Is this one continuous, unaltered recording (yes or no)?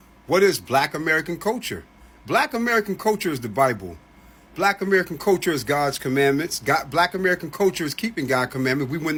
yes